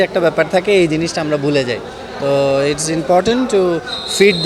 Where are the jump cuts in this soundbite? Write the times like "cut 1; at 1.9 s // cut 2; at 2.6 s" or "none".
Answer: none